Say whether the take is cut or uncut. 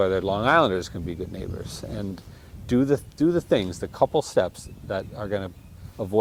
uncut